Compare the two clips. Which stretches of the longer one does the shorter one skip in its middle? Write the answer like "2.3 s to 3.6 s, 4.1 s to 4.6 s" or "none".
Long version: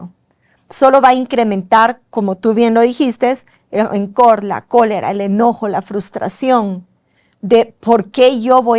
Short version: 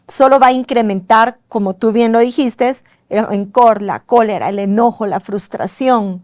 none